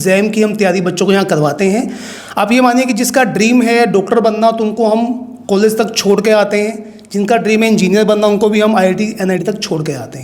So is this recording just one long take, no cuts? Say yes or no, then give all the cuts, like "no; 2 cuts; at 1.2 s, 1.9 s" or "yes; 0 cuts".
yes; 0 cuts